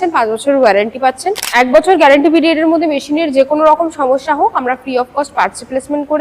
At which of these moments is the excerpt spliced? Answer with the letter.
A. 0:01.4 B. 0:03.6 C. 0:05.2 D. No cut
A